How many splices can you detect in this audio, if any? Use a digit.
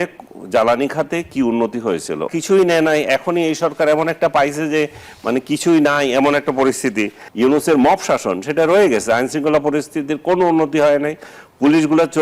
2